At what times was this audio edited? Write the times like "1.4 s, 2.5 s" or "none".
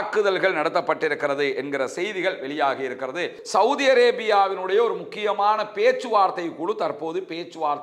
3.4 s